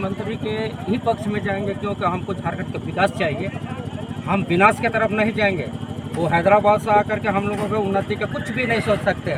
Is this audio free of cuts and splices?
yes; 0 cuts

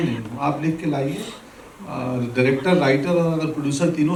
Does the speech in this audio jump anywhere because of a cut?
no; 0 cuts

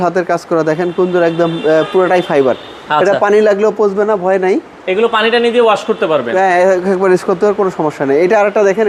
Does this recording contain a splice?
no; 0 cuts

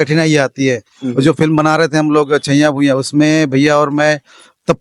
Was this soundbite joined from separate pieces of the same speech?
no; 0 cuts

